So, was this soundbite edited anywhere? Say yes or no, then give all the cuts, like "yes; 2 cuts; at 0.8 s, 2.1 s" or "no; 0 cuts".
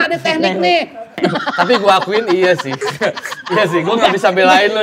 yes; 1 cut; at 1.2 s